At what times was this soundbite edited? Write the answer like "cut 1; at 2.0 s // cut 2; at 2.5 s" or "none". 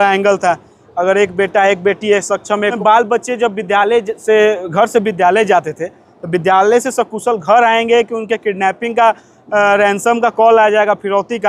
cut 1; at 2.8 s